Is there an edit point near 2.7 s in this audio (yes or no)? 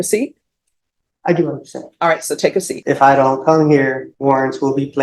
yes